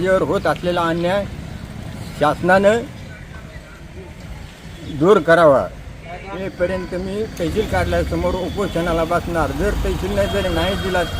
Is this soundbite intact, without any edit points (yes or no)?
no